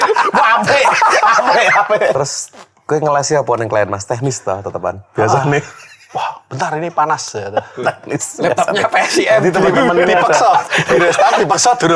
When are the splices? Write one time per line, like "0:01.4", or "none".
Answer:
0:02.2